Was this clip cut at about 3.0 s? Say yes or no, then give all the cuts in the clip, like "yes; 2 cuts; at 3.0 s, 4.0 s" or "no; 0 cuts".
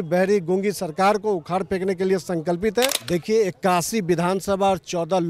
yes; 1 cut; at 3.0 s